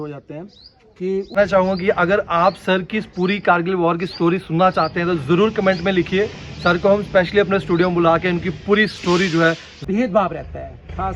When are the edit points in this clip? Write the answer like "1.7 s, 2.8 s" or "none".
1.4 s, 9.7 s

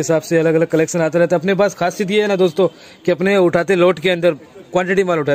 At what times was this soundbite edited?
none

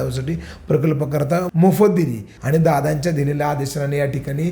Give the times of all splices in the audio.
1.5 s, 2.3 s

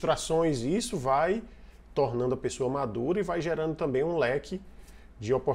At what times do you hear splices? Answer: none

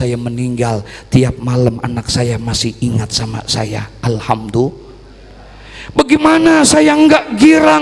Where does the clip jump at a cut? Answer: none

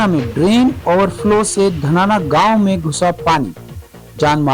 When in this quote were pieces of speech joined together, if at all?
none

